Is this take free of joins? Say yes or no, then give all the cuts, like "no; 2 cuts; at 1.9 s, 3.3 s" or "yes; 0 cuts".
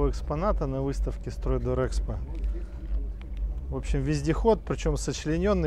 yes; 0 cuts